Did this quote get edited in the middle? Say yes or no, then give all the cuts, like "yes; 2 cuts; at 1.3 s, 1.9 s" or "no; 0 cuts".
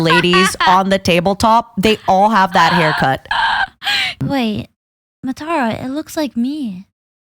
yes; 1 cut; at 4.2 s